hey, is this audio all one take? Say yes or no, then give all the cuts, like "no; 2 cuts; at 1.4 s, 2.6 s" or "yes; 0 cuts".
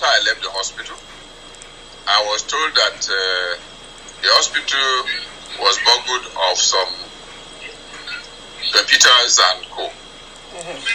yes; 0 cuts